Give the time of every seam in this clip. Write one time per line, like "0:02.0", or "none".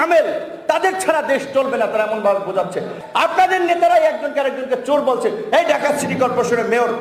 0:03.0